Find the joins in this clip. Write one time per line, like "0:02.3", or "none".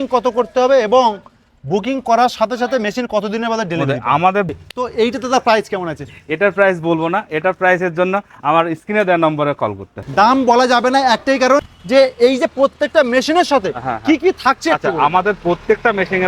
0:04.6
0:10.0
0:11.7